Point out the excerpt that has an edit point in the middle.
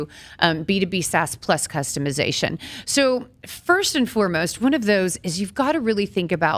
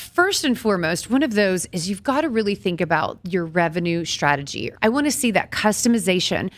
second; 1 cut; at 4.6 s

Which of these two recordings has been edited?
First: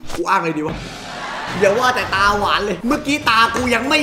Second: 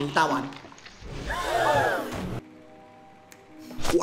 second; 1 cut; at 2.4 s

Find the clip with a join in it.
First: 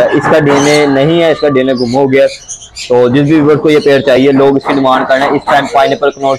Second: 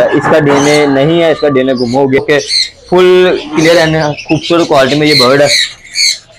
second; 1 cut; at 2.2 s

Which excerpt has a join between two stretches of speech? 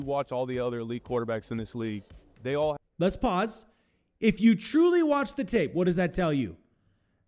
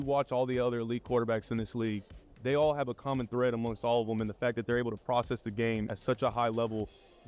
second; 2 cuts; at 2.8 s, 6.0 s

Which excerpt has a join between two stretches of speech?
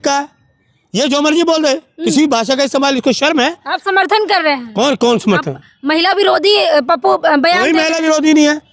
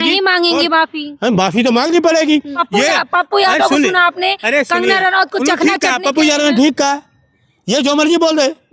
second; 1 cut; at 2.6 s

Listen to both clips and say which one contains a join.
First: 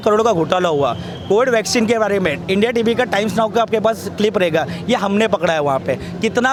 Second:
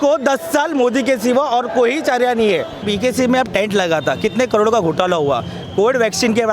second; 1 cut; at 2.8 s

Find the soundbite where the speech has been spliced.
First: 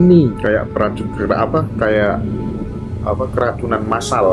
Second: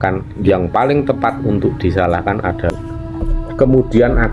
second; 1 cut; at 2.7 s

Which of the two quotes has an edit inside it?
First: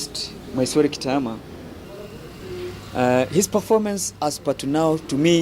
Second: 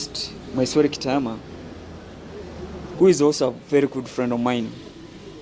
first; 1 cut; at 1.8 s

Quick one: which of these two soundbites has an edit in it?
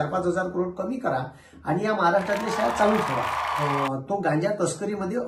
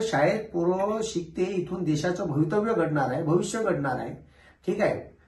first; 1 cut; at 3.6 s

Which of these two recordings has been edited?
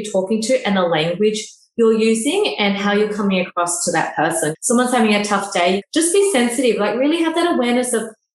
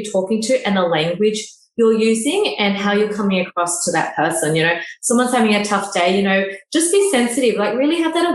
first; 2 cuts; at 4.5 s, 5.8 s

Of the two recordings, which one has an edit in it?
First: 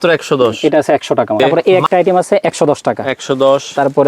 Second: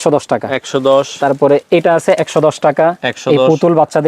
first; 1 cut; at 1.6 s

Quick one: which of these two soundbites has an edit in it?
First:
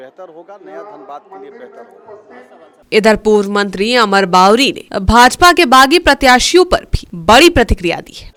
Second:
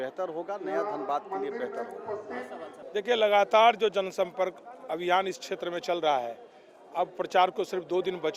second; 1 cut; at 2.8 s

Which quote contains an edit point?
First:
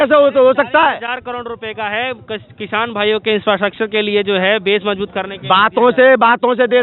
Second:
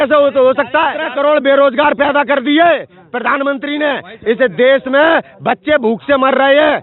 second; 1 cut; at 1.0 s

